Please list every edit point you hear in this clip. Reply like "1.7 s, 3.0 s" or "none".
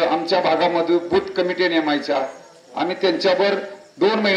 none